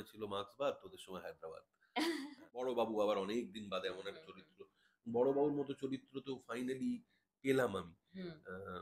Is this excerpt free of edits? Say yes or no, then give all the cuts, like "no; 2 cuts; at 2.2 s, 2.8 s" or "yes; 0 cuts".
no; 1 cut; at 2.6 s